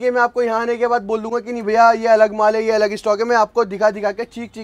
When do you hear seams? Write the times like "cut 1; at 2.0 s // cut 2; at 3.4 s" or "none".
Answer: none